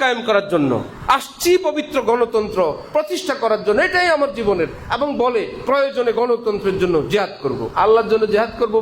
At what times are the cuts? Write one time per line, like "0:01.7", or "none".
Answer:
0:07.7